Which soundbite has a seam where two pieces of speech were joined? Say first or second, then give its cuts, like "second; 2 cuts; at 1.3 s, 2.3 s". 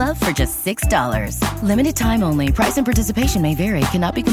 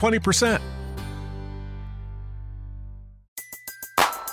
second; 1 cut; at 3.2 s